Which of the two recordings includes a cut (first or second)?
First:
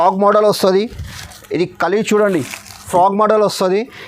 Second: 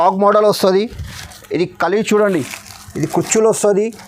first